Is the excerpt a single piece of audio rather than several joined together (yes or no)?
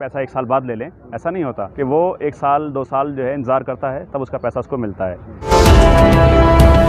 no